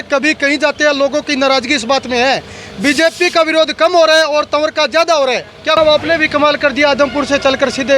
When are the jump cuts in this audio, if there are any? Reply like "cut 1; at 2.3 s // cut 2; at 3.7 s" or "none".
cut 1; at 5.8 s